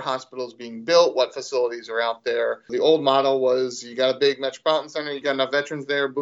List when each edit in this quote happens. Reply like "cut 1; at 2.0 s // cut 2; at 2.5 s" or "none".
cut 1; at 2.7 s // cut 2; at 5.2 s